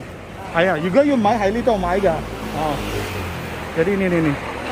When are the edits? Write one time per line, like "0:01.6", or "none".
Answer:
none